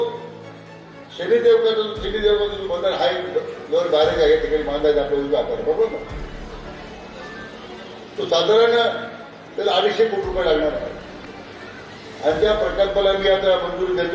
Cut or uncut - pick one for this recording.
uncut